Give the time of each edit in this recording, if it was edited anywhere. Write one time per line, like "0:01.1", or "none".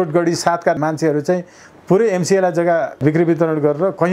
0:00.8
0:03.0